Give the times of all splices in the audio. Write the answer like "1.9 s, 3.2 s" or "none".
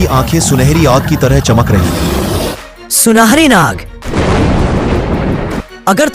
2.5 s